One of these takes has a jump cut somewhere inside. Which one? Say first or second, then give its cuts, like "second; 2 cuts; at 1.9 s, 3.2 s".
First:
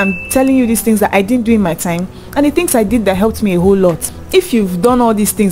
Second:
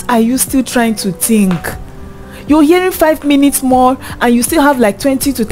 first; 1 cut; at 4.1 s